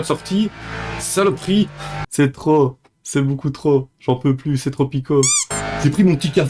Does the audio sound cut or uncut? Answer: cut